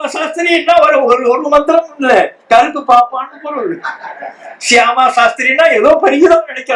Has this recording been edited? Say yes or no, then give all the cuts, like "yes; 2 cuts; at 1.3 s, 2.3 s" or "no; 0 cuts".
no; 0 cuts